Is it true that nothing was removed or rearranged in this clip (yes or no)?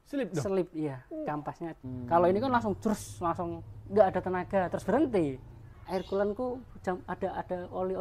no